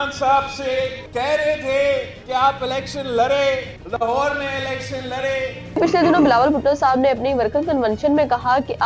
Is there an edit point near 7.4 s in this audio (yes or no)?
no